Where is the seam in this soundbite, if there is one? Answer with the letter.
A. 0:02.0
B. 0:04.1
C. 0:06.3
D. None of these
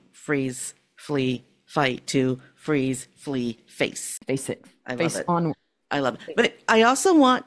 B